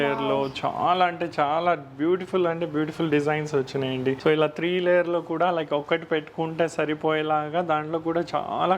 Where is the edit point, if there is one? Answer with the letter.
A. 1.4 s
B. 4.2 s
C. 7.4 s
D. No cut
B